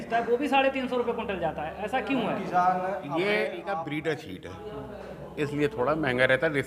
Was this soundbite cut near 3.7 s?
yes; 1 cut; at 3.7 s

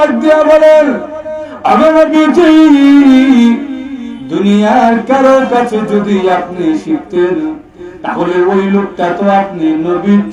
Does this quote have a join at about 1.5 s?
no; 0 cuts

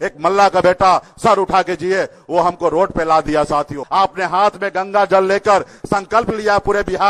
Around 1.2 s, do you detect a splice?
no; 1 cut; at 3.8 s

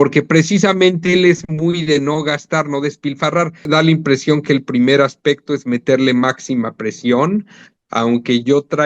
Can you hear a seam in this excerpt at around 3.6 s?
yes; 1 cut; at 3.6 s

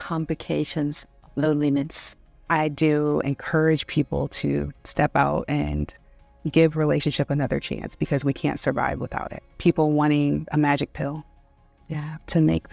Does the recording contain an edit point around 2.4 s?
yes; 2 cuts; at 2.4 s, 9.5 s

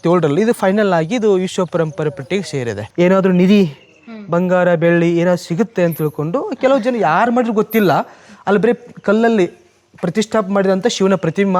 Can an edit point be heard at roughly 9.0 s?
no; 1 cut; at 2.8 s

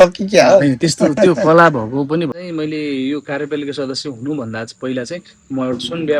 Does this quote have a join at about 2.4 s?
yes; 1 cut; at 2.4 s

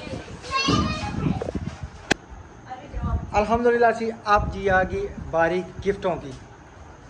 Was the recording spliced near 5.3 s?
no; 1 cut; at 2.1 s

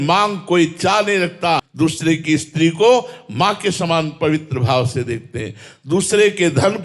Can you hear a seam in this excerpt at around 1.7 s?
yes; 1 cut; at 1.7 s

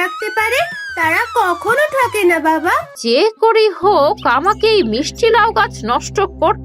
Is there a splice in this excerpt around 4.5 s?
no; 1 cut; at 2.9 s

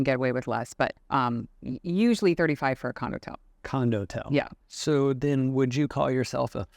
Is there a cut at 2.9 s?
no; 2 cuts; at 1.0 s, 4.6 s

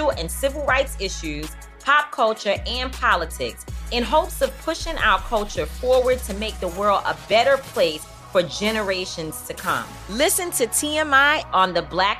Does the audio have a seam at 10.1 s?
no; 0 cuts

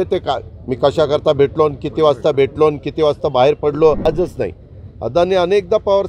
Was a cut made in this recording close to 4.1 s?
yes; 1 cut; at 4.1 s

